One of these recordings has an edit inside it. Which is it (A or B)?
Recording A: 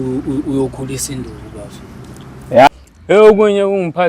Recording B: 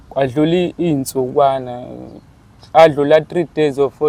A